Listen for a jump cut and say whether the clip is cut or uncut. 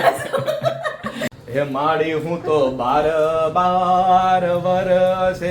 cut